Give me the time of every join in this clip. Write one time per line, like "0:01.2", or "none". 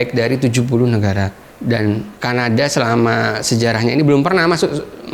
none